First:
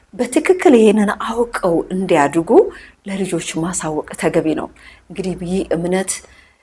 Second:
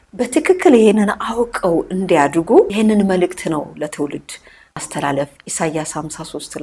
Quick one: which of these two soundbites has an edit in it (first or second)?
second